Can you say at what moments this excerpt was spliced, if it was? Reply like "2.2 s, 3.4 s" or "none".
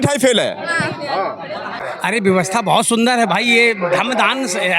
1.9 s